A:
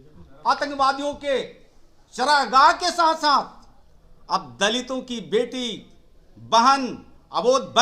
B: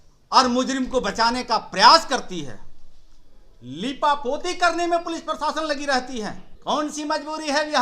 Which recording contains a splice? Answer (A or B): B